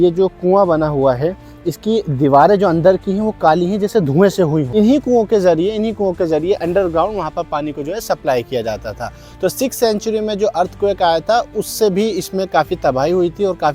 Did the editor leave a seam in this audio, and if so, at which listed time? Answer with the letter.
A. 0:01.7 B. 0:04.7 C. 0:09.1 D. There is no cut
B